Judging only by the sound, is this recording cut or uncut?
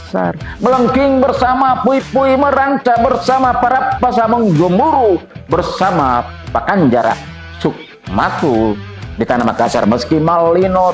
uncut